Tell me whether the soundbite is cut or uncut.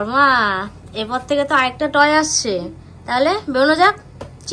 uncut